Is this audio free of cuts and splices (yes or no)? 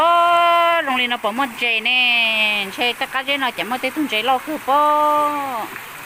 yes